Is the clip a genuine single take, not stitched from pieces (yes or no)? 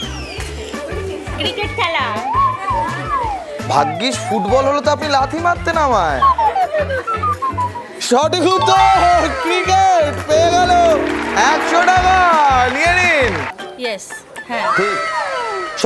no